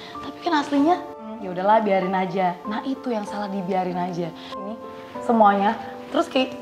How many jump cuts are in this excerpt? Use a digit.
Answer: 2